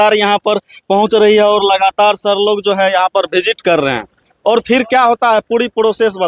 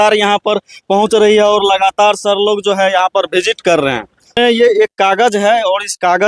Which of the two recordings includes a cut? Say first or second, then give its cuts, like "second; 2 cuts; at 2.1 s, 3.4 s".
second; 1 cut; at 4.4 s